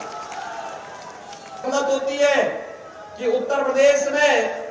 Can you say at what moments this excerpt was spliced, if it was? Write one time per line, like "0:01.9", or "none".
0:01.7